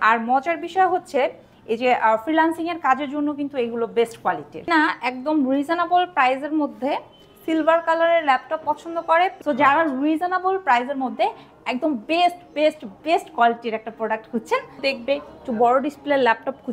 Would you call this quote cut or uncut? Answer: cut